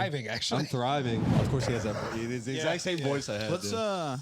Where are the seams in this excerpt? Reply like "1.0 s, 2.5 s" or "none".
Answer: 1.3 s